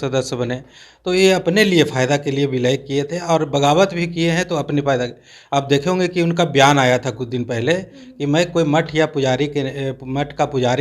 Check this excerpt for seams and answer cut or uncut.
uncut